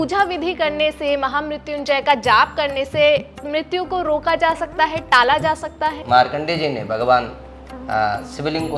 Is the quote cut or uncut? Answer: cut